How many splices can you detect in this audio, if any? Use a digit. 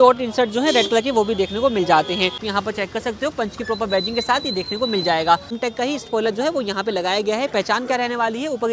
2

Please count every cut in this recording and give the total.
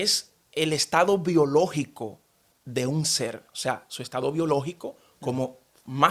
0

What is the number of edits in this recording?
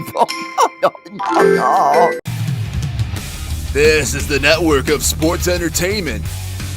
1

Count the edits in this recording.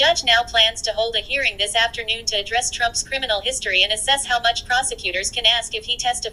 0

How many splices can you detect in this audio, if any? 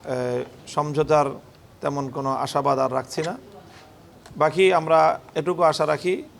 0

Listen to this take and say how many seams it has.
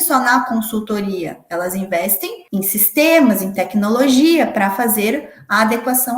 1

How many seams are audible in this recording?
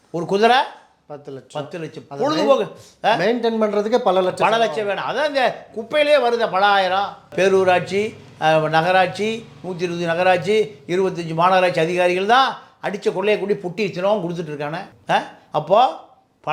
1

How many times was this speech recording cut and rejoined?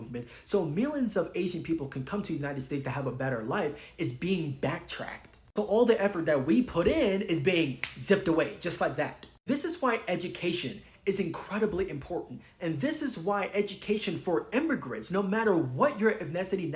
0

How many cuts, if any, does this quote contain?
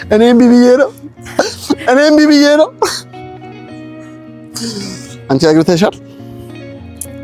0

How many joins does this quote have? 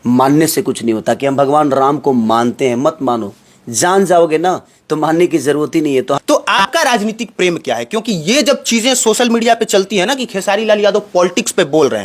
1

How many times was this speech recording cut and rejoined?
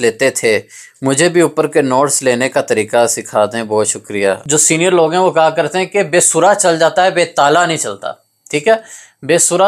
1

